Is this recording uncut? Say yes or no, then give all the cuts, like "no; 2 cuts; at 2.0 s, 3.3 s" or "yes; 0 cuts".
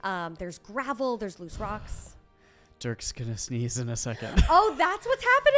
yes; 0 cuts